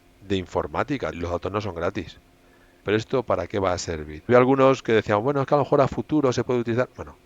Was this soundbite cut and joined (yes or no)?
yes